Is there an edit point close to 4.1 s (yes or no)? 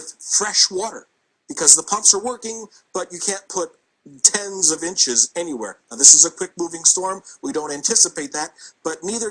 no